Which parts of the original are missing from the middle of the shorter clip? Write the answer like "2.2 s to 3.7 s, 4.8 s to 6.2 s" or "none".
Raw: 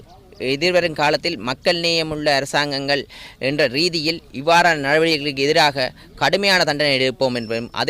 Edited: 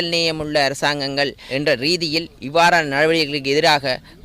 3.1 s to 3.3 s